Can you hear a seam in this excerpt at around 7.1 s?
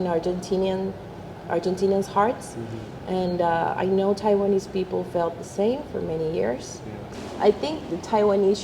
yes; 1 cut; at 7.1 s

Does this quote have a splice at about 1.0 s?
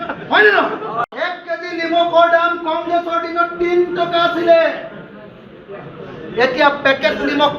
yes; 1 cut; at 1.0 s

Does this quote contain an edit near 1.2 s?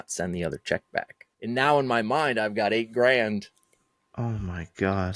yes; 1 cut; at 1.2 s

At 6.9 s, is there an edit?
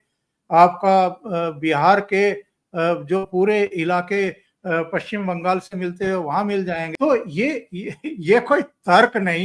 yes; 1 cut; at 6.9 s

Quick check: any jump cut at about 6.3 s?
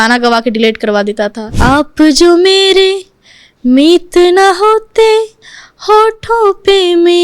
no; 1 cut; at 1.4 s

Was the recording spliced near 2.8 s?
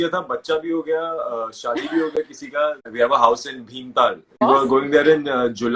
yes; 2 cuts; at 2.8 s, 4.4 s

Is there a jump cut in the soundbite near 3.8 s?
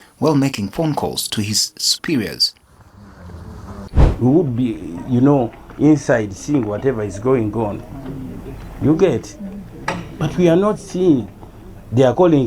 yes; 1 cut; at 3.8 s

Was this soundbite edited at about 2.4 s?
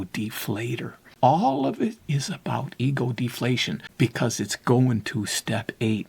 no; 2 cuts; at 1.0 s, 3.8 s

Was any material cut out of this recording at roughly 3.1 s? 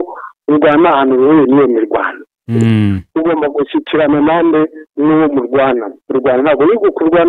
no; 0 cuts

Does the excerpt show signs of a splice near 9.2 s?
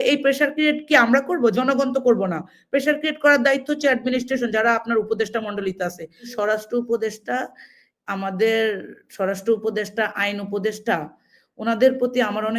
no; 1 cut; at 6.3 s

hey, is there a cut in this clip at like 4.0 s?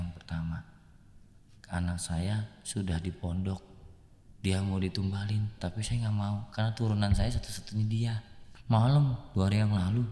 no; 1 cut; at 8.4 s

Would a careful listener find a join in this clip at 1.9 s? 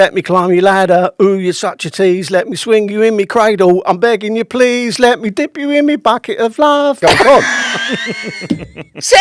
no; 1 cut; at 7.0 s

